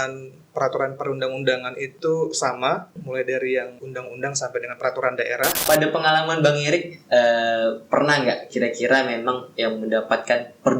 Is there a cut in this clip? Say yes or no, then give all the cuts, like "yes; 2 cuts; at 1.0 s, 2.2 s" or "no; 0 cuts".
yes; 4 cuts; at 1.9 s, 2.9 s, 3.8 s, 5.6 s